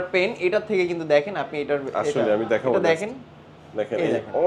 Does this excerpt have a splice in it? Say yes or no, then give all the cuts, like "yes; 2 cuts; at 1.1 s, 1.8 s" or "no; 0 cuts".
no; 0 cuts